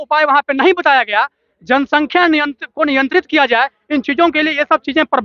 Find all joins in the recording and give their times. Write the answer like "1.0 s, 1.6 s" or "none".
none